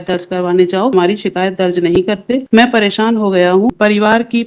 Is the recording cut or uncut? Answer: cut